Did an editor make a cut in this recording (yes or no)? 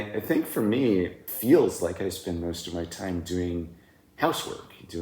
yes